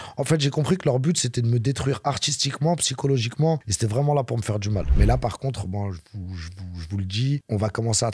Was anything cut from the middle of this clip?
yes; 1 cut; at 4.9 s

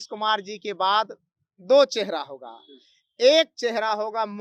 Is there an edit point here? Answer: no; 0 cuts

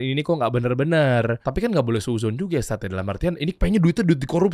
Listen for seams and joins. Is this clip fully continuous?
no; 1 cut; at 1.4 s

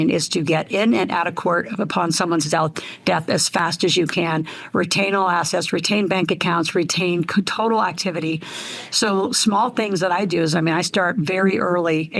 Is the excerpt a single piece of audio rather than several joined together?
yes; 0 cuts

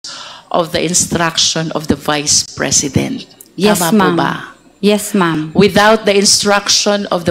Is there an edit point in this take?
no; 0 cuts

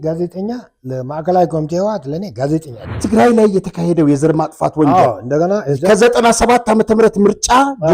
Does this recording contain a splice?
yes; 1 cut; at 3.0 s

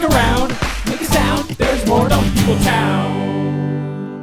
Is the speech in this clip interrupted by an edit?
no; 0 cuts

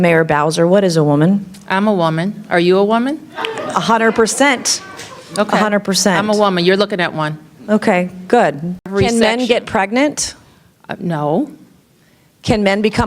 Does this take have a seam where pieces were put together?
yes; 1 cut; at 8.9 s

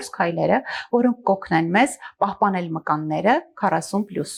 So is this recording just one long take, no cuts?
yes; 0 cuts

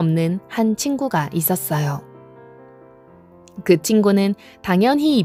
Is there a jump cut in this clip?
no; 0 cuts

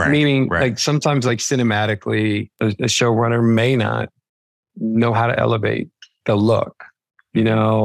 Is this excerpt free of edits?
no; 1 cut; at 2.5 s

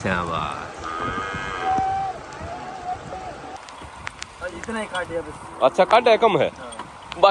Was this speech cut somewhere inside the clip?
yes; 1 cut; at 3.6 s

